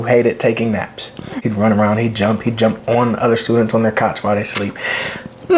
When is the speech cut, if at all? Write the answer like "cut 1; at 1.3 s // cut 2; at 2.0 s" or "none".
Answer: cut 1; at 1.4 s